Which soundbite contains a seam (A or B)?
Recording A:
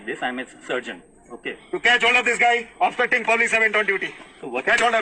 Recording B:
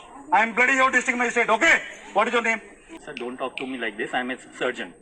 B